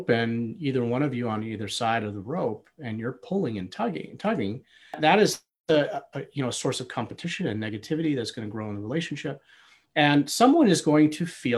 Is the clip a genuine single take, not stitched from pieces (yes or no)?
yes